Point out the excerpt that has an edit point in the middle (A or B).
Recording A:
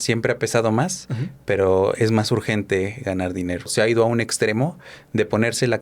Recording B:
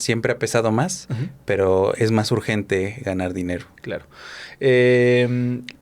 A